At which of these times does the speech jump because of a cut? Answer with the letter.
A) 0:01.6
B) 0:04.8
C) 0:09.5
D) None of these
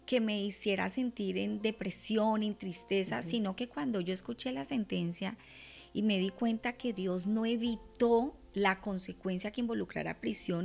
D